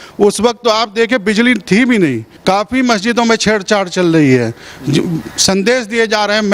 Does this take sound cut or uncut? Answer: cut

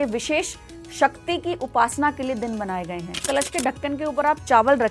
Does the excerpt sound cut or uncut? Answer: cut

